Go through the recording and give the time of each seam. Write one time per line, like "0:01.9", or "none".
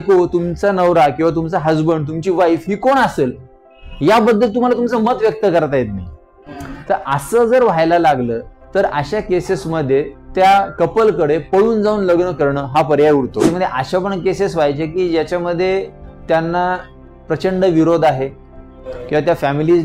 0:13.5